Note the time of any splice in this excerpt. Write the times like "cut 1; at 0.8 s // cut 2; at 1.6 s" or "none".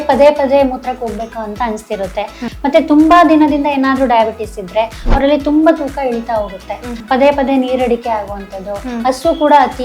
cut 1; at 2.5 s // cut 2; at 6.9 s